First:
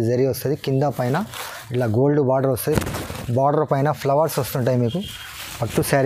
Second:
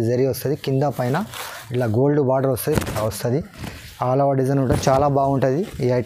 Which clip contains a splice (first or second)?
second